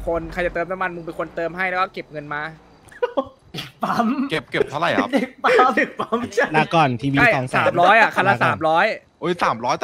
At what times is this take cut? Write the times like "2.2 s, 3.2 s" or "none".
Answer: none